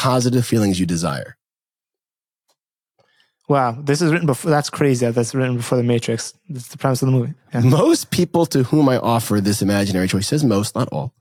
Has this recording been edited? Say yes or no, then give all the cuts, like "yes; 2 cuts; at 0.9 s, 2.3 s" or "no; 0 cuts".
no; 0 cuts